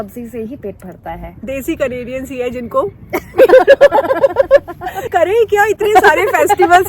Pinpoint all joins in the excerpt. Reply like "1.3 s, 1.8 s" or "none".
1.4 s, 5.0 s